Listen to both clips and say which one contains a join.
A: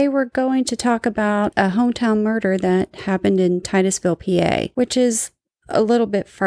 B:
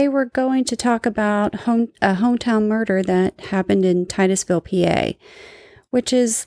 A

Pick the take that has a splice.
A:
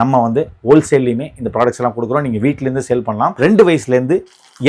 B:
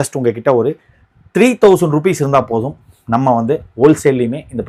A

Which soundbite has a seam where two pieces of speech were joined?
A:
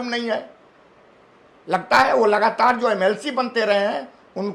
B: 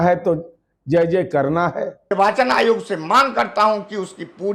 B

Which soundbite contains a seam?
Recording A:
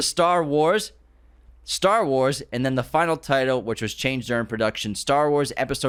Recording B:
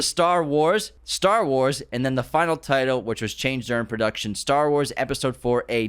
B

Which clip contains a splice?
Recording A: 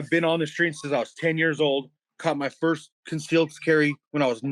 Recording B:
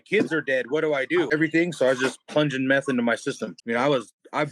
B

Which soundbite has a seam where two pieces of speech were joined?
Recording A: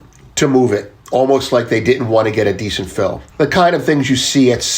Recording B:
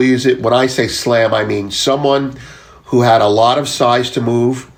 A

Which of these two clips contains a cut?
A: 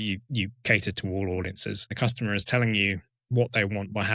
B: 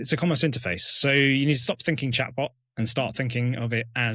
A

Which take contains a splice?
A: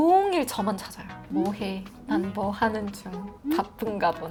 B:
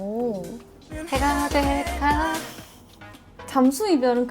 B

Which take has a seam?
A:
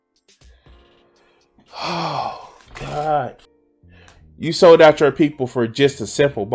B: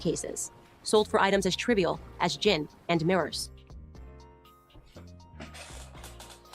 A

